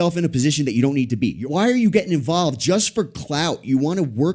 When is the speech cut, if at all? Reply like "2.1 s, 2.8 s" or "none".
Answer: 1.4 s